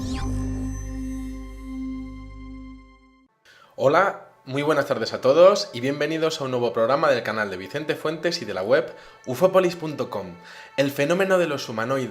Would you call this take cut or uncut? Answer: cut